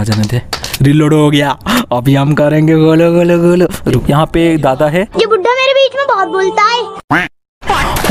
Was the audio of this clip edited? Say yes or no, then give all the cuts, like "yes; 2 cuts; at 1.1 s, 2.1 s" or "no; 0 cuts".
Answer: yes; 1 cut; at 4.0 s